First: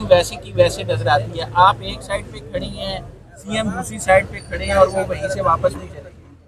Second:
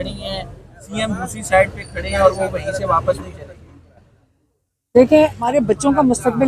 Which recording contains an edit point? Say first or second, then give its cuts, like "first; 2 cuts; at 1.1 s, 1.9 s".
second; 1 cut; at 5.4 s